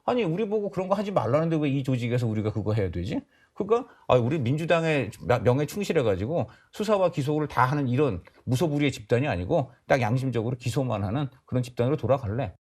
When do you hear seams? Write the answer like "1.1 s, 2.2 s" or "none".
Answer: none